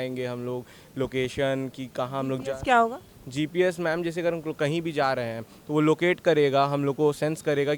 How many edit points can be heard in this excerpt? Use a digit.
0